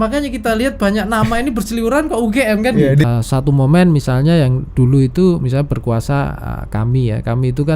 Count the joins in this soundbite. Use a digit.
1